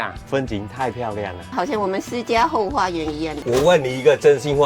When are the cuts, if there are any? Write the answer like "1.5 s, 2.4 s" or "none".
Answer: 3.3 s

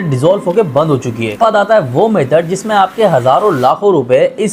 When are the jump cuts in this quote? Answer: 1.4 s

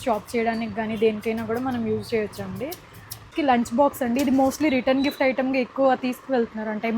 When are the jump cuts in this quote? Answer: 3.3 s

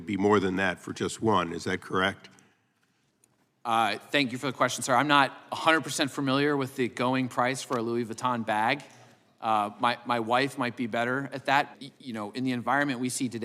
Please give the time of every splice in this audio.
11.7 s

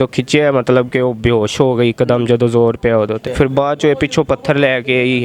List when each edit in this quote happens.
3.3 s

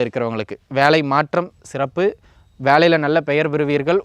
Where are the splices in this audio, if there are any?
none

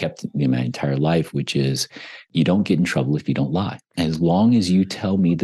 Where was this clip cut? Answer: 2.3 s, 3.8 s

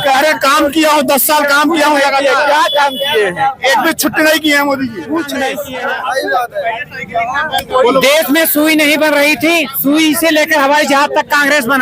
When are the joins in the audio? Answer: 5.6 s

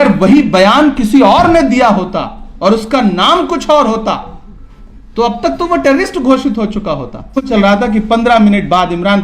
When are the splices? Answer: 7.5 s

